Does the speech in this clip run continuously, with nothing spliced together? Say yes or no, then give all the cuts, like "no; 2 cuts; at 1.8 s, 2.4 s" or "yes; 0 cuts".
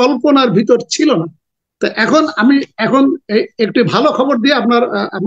yes; 0 cuts